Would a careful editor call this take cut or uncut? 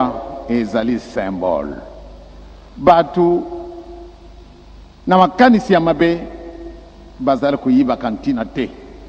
uncut